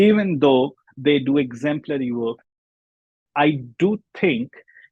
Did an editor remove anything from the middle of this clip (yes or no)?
yes